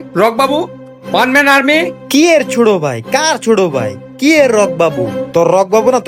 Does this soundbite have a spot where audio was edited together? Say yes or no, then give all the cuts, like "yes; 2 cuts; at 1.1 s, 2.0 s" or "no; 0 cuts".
no; 0 cuts